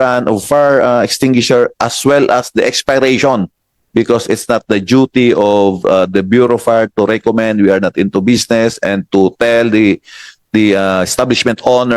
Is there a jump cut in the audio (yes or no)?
no